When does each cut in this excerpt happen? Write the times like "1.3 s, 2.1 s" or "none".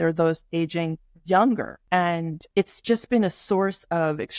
2.2 s